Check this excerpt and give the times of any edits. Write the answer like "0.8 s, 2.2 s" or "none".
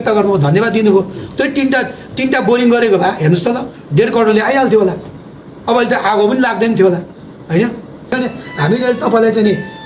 8.1 s

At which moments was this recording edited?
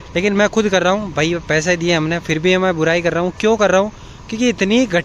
3.9 s

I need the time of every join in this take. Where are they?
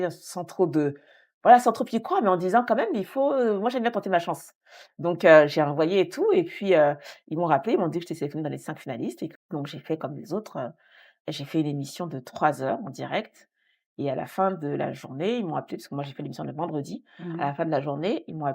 9.4 s

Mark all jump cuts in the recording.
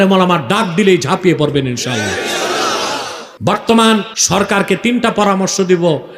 3.2 s, 4.2 s

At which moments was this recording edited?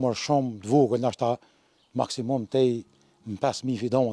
none

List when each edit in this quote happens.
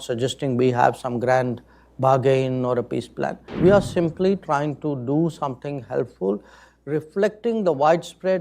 3.4 s

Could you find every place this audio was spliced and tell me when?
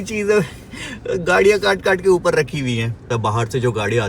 3.1 s

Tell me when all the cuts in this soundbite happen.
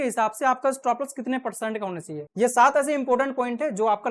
2.3 s

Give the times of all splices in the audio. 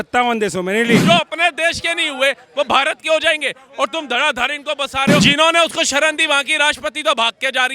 1.0 s, 5.2 s

